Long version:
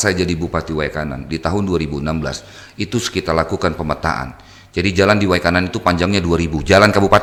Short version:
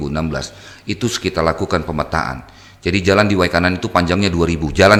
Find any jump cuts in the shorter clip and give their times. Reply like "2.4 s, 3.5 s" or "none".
none